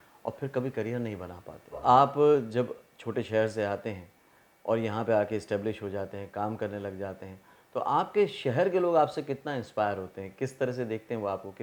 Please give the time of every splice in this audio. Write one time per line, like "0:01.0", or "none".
0:01.8